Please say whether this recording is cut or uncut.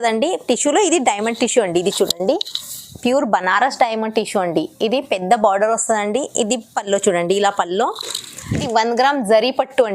cut